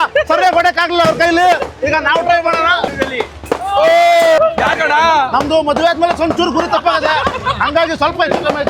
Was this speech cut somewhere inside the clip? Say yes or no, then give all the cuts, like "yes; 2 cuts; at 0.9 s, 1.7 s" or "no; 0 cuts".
yes; 2 cuts; at 2.9 s, 4.4 s